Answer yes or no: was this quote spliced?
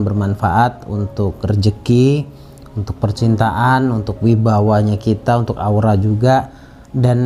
no